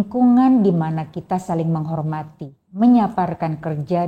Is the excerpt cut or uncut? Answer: cut